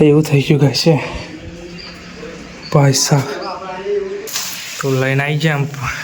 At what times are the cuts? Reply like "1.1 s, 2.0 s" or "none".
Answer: 4.3 s